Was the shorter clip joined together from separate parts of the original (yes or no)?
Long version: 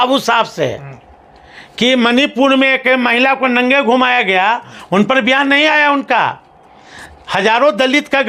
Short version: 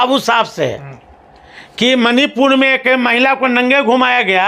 no